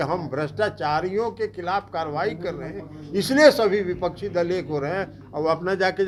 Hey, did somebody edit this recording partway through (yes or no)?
no